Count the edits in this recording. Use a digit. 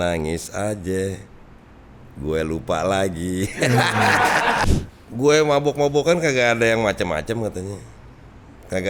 1